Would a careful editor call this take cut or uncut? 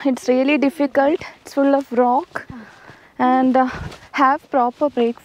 uncut